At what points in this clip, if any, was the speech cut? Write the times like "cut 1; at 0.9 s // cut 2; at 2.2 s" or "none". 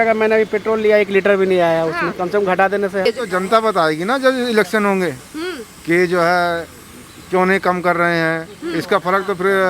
cut 1; at 3.0 s